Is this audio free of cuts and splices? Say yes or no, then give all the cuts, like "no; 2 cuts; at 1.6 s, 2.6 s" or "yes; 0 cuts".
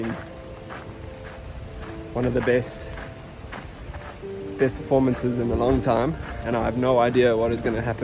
no; 1 cut; at 6.3 s